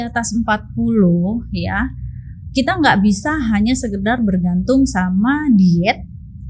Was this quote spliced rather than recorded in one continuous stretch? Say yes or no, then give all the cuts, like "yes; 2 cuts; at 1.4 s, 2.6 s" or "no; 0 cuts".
no; 0 cuts